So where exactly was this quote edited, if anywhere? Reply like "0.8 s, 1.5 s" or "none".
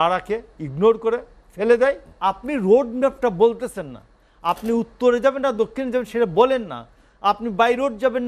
2.1 s